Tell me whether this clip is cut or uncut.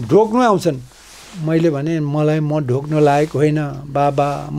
uncut